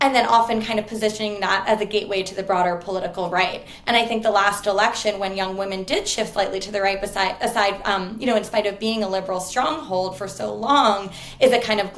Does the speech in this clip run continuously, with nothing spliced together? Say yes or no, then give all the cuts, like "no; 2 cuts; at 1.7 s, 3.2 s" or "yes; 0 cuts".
yes; 0 cuts